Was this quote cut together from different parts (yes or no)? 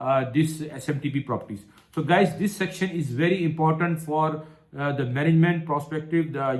no